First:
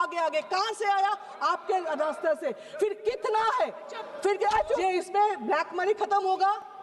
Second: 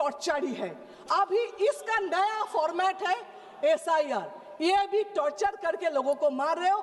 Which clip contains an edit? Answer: first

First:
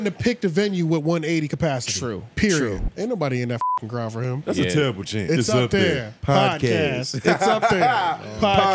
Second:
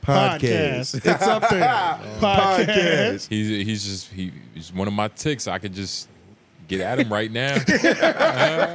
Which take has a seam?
first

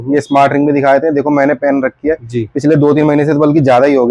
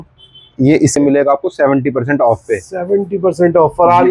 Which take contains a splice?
second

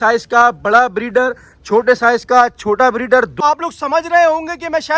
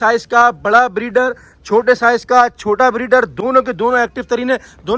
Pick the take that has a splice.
first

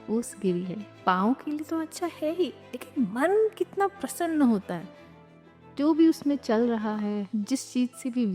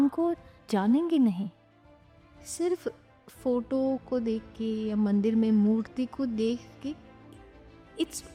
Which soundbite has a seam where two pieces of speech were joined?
first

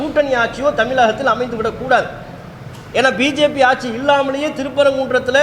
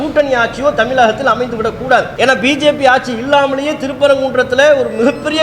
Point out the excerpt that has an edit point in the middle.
second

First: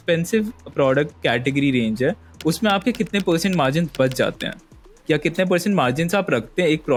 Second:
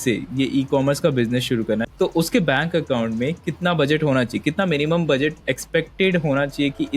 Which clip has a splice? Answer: second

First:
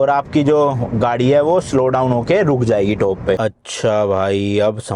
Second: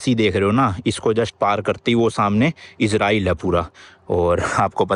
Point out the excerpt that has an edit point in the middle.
first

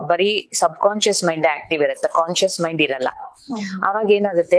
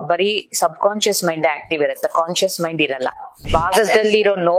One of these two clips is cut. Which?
second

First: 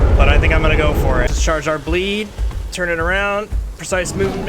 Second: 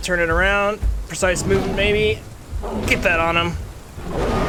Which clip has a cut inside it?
first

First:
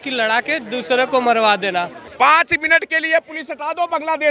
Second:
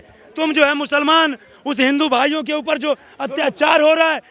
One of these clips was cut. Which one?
first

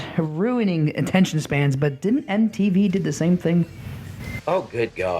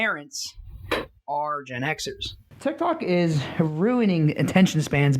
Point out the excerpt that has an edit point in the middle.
second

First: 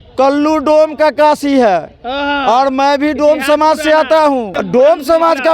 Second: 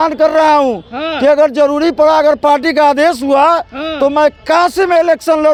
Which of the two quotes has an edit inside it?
first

